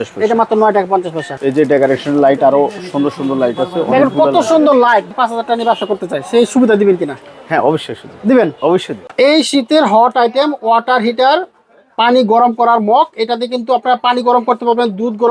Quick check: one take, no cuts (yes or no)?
no